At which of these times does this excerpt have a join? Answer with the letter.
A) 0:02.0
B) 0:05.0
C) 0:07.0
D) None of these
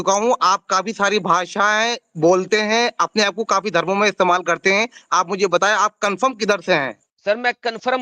C